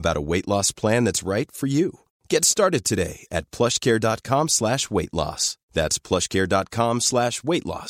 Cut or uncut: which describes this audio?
uncut